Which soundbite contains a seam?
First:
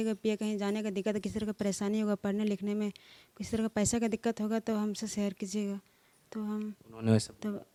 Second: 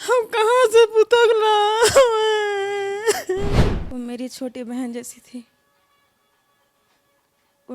second; 1 cut; at 3.5 s

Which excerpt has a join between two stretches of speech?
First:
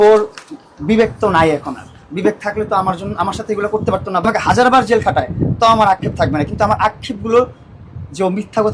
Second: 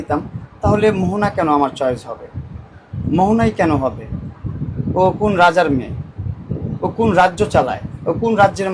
first; 1 cut; at 4.2 s

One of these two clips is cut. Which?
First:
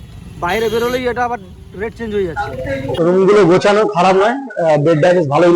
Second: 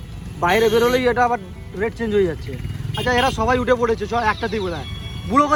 first; 1 cut; at 2.4 s

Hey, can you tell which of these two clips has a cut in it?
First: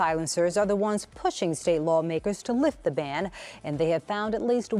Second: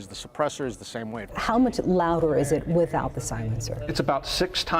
second; 1 cut; at 1.3 s

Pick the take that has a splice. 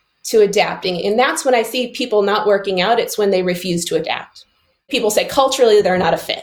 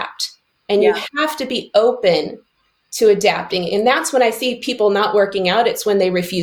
first; 1 cut; at 4.9 s

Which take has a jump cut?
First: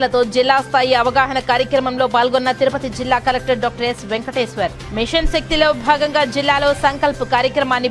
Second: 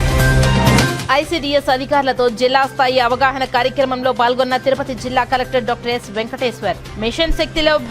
second; 1 cut; at 1.0 s

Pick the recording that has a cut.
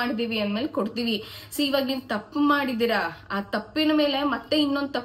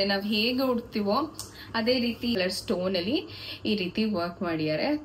second; 1 cut; at 2.4 s

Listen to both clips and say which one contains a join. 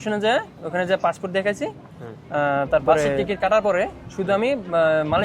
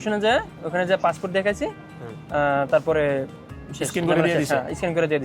first; 1 cut; at 3.2 s

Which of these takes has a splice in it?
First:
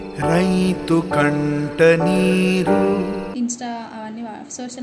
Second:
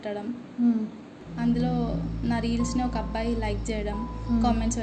first; 1 cut; at 3.3 s

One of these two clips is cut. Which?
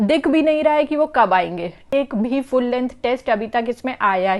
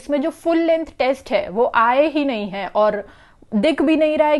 first; 1 cut; at 1.9 s

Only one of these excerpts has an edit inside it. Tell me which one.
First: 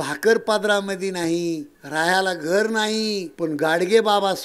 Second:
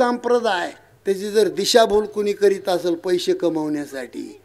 first; 2 cuts; at 1.8 s, 3.3 s

